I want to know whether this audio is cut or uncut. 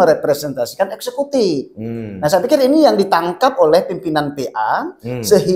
uncut